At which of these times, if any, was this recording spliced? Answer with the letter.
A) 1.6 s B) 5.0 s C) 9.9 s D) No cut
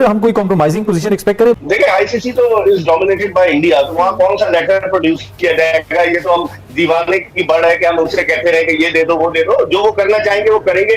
A